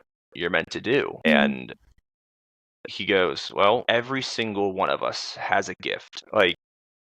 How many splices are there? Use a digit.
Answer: 3